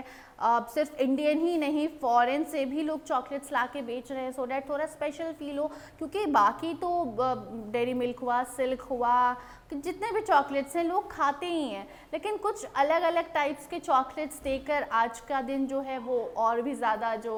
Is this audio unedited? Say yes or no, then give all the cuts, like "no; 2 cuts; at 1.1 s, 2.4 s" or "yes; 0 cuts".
yes; 0 cuts